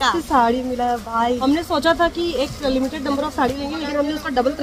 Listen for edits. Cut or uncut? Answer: cut